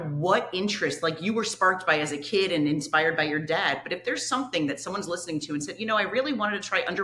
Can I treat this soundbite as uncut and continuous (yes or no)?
yes